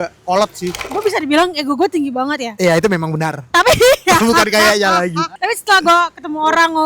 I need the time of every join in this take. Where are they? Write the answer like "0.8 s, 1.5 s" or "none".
0.9 s, 5.3 s